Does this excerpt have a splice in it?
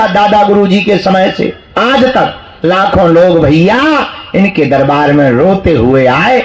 no; 0 cuts

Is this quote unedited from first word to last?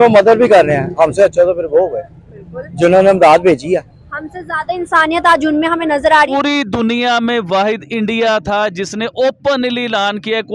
no; 1 cut; at 6.3 s

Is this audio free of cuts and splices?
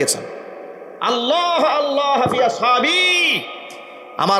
yes; 0 cuts

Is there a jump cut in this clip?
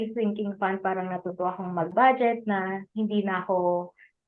no; 0 cuts

